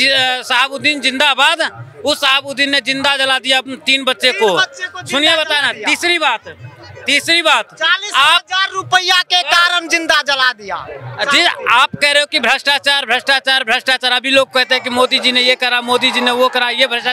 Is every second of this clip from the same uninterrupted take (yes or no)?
yes